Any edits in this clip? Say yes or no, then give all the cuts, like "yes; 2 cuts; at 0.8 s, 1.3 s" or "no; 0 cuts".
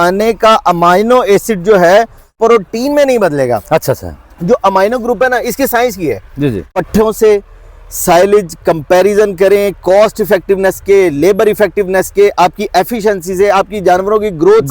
yes; 2 cuts; at 2.3 s, 6.8 s